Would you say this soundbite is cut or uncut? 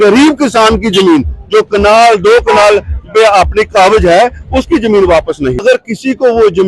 cut